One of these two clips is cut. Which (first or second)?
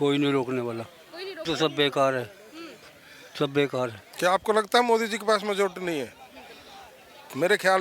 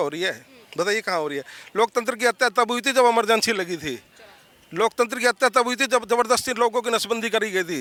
first